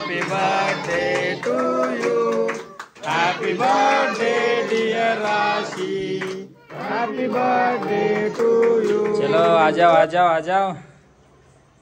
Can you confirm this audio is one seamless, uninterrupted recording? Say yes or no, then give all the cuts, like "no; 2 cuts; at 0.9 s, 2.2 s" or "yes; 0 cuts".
no; 1 cut; at 9.3 s